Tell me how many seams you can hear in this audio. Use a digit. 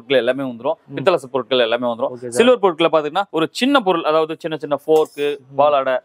1